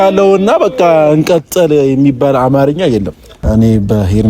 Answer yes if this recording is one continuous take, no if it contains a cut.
no